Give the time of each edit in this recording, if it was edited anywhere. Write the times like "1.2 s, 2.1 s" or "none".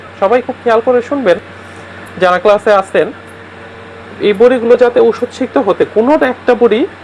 none

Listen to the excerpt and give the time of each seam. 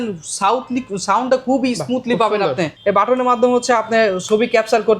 2.7 s

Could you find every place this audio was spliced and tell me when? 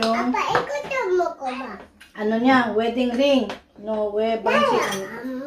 none

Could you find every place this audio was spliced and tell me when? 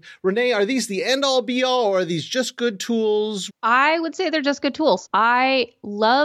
3.4 s, 5.1 s

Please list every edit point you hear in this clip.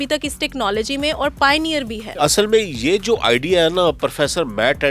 2.0 s

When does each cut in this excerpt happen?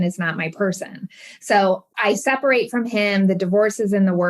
1.9 s

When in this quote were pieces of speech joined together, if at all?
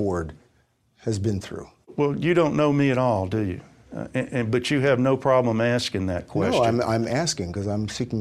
1.9 s

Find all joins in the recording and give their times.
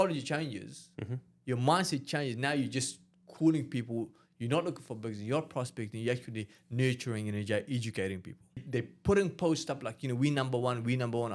8.6 s

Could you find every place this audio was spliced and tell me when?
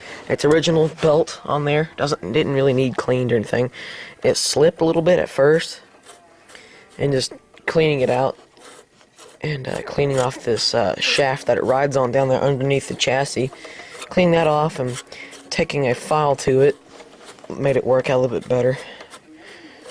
10.1 s

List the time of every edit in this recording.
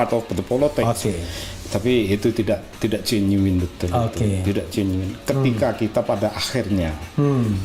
none

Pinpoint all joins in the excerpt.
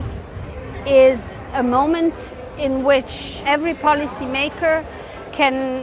3.4 s

